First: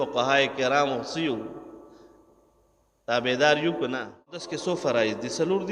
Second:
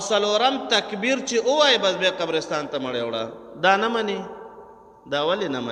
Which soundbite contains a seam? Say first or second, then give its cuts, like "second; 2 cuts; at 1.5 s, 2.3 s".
first; 1 cut; at 4.5 s